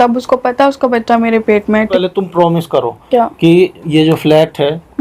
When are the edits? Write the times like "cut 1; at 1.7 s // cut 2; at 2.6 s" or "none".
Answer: cut 1; at 1.9 s